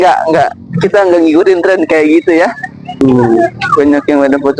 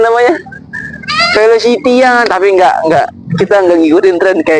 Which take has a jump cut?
first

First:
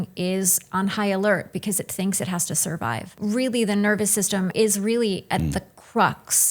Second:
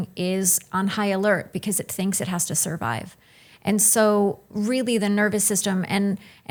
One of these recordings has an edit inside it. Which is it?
first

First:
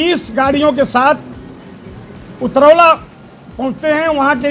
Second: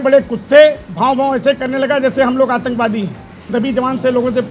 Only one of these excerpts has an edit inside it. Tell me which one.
second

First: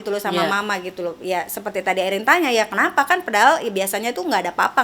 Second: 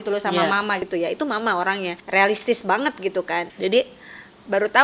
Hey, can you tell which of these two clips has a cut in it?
second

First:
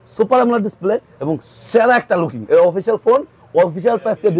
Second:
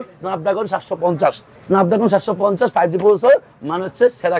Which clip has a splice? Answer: second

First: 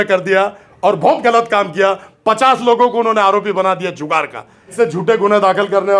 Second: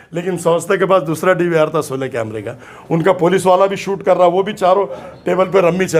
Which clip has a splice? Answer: first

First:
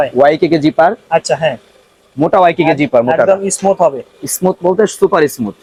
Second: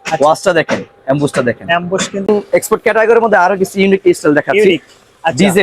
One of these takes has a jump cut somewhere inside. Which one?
second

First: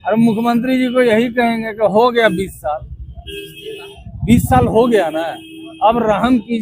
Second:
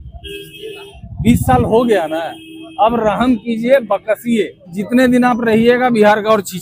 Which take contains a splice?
second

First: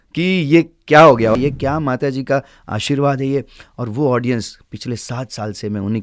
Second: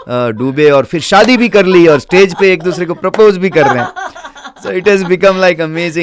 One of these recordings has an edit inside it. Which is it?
first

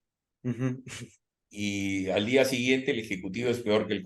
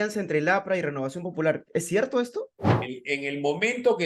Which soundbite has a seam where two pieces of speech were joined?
second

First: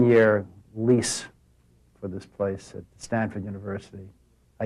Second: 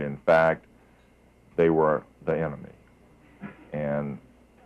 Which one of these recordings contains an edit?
second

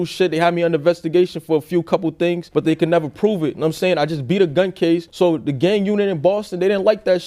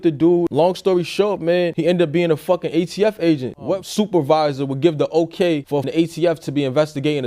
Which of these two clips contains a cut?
second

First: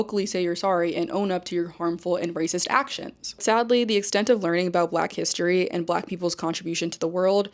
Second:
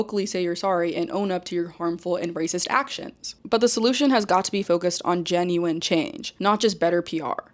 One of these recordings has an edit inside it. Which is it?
first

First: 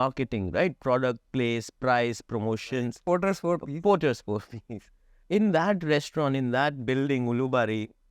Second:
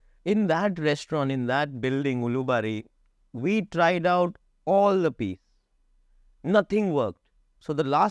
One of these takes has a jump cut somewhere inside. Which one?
first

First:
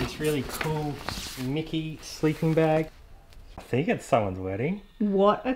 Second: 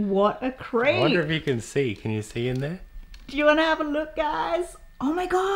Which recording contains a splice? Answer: first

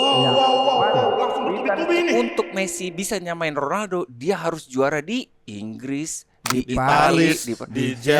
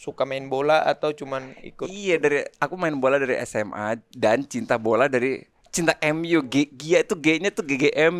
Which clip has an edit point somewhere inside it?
first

